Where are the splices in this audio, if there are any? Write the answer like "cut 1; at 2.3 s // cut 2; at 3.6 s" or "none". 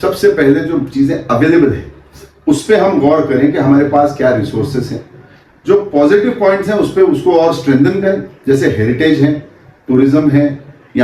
none